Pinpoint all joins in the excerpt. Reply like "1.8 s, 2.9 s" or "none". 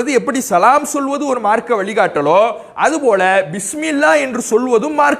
none